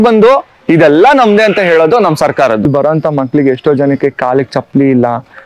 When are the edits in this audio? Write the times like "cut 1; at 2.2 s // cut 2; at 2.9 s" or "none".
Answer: cut 1; at 2.6 s